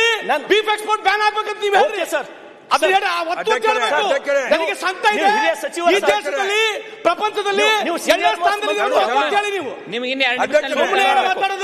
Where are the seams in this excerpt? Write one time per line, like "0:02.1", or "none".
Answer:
none